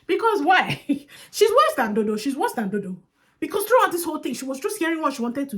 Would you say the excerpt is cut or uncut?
cut